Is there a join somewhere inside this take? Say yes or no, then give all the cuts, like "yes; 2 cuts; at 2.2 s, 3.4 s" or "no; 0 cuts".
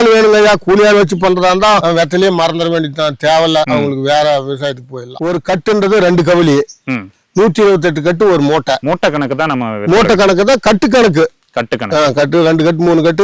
yes; 2 cuts; at 5.2 s, 8.8 s